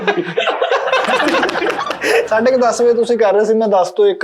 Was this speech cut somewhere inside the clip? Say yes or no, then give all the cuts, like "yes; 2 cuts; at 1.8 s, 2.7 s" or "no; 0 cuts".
yes; 1 cut; at 2.3 s